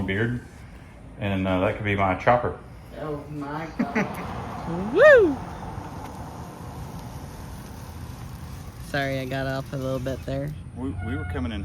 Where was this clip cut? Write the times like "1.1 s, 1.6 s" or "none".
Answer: 4.1 s